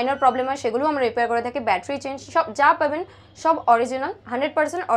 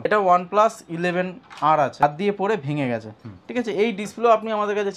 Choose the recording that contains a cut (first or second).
second